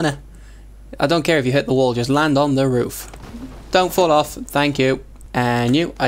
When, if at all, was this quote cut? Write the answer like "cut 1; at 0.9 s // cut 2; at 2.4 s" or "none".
cut 1; at 5.2 s